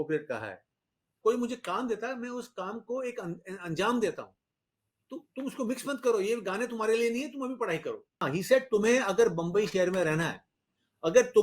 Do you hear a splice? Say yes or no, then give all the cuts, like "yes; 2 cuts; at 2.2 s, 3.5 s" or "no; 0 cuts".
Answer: yes; 2 cuts; at 1.2 s, 8.2 s